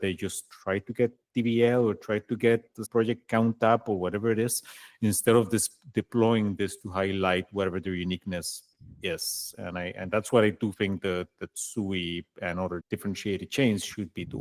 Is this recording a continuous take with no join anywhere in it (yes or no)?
no